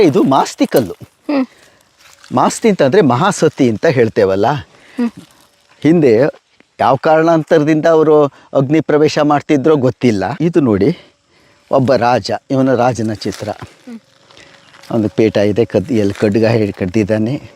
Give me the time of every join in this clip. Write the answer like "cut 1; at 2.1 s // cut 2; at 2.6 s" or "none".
cut 1; at 10.3 s